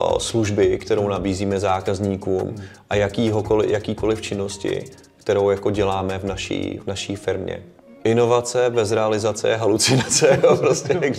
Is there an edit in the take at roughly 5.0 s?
no; 1 cut; at 7.7 s

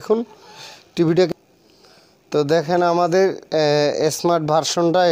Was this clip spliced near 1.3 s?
yes; 1 cut; at 1.3 s

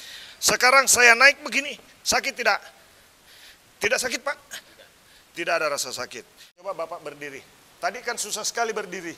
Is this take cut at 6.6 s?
yes; 1 cut; at 6.6 s

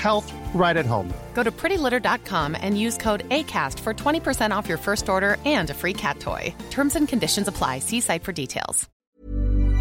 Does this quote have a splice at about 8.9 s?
yes; 1 cut; at 8.9 s

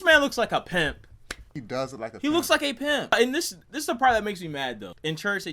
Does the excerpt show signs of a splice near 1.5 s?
yes; 1 cut; at 1.5 s

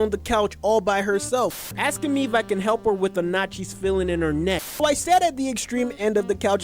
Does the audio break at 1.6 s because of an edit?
yes; 2 cuts; at 1.6 s, 4.8 s

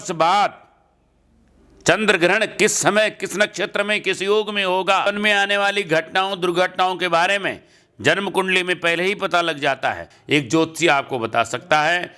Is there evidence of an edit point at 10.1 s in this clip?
yes; 2 cuts; at 5.0 s, 10.1 s

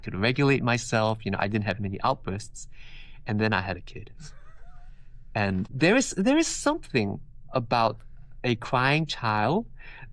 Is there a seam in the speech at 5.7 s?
yes; 1 cut; at 5.7 s

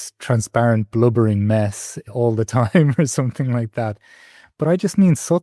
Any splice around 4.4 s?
no; 1 cut; at 2.0 s

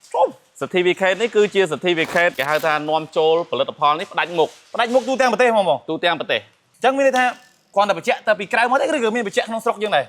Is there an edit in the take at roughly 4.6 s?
no; 1 cut; at 6.6 s

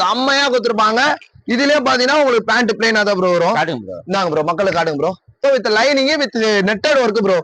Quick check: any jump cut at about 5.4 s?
yes; 1 cut; at 5.4 s

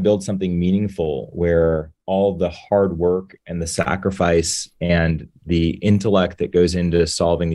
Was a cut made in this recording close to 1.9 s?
yes; 1 cut; at 1.9 s

